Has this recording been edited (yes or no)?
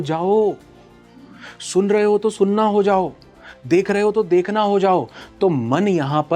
no